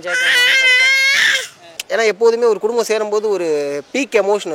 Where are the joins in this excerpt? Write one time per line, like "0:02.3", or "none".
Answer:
0:01.8